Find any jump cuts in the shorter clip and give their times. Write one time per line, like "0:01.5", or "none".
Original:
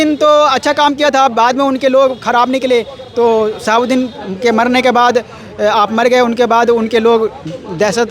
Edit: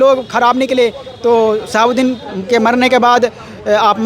none